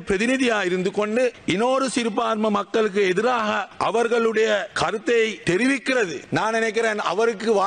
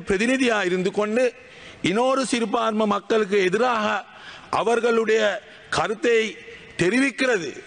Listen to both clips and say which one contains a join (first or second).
first